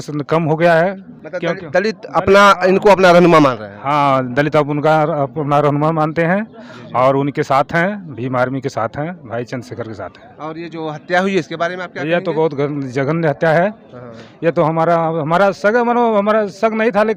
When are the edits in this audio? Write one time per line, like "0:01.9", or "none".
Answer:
none